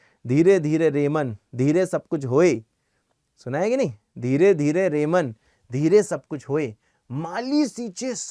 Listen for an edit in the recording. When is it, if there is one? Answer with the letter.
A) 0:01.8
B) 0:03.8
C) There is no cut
C